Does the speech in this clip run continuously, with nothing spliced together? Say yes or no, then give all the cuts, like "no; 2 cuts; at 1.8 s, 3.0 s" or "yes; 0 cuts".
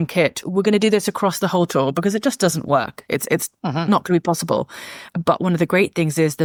yes; 0 cuts